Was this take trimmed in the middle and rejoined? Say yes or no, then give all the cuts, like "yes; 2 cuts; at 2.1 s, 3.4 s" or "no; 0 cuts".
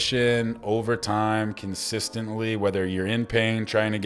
no; 0 cuts